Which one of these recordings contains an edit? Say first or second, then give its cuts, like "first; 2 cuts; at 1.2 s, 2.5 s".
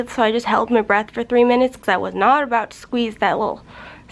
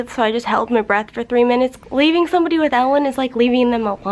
second; 1 cut; at 1.8 s